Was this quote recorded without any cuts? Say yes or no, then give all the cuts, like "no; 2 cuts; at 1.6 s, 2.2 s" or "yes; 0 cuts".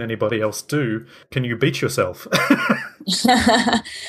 no; 1 cut; at 1.2 s